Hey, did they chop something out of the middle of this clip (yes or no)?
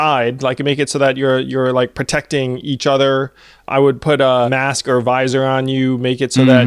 yes